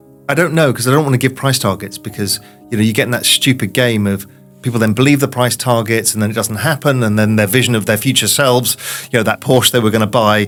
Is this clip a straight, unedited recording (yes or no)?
yes